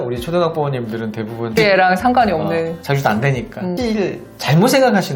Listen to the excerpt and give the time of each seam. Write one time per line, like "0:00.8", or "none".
0:01.6
0:03.7